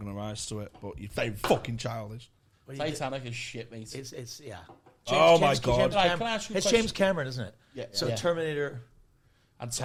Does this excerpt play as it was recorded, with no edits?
yes; 0 cuts

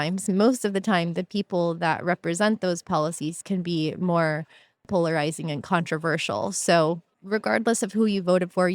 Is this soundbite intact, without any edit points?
no; 2 cuts; at 4.8 s, 7.1 s

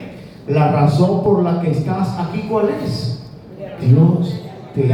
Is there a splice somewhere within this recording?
no; 0 cuts

